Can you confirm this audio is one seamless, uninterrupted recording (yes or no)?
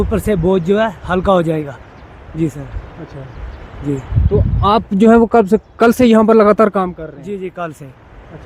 yes